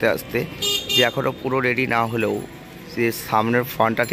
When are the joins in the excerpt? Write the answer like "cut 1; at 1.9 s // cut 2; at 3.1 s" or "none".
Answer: none

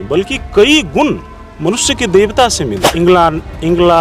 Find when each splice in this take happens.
cut 1; at 2.8 s

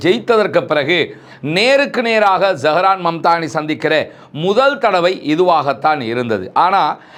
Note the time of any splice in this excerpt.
none

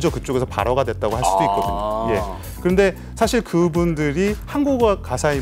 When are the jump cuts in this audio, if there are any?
none

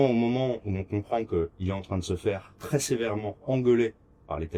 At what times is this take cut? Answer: none

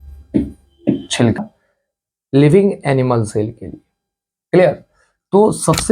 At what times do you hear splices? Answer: cut 1; at 1.4 s

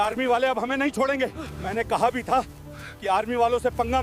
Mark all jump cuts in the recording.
none

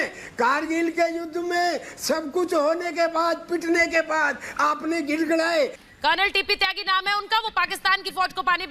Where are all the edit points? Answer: cut 1; at 5.8 s

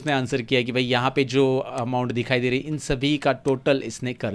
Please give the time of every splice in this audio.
none

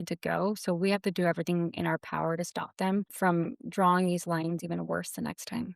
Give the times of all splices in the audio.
cut 1; at 3.1 s

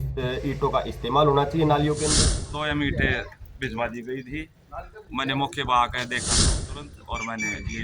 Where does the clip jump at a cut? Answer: cut 1; at 2.4 s // cut 2; at 6.5 s

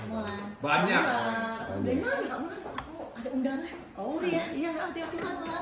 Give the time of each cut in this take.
none

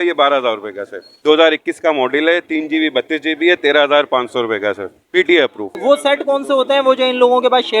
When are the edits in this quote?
cut 1; at 1.2 s // cut 2; at 5.6 s

